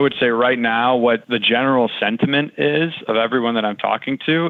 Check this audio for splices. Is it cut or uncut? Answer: uncut